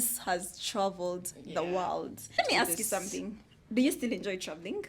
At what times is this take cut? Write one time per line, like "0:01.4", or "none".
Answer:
0:02.4